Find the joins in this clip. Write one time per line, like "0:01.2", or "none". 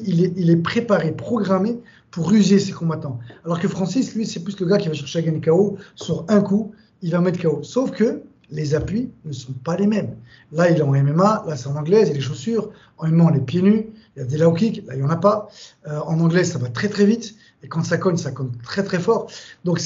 none